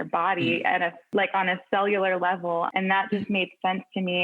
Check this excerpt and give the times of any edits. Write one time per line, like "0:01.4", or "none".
0:01.1
0:02.7